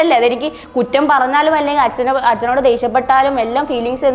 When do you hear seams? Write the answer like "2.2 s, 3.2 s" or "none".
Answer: none